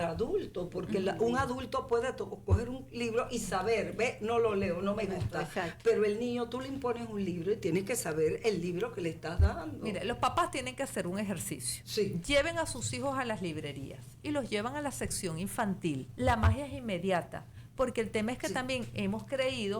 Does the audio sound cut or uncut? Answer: cut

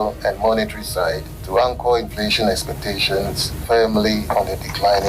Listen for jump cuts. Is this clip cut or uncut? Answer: cut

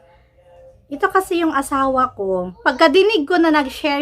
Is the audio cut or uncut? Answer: cut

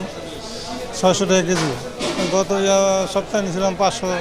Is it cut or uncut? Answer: uncut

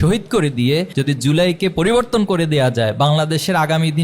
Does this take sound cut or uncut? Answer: cut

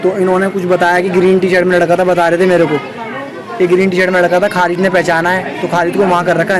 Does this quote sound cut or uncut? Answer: uncut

